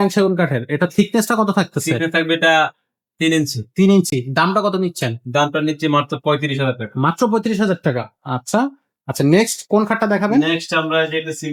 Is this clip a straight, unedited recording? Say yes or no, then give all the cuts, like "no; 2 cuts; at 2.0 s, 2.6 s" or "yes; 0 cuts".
yes; 0 cuts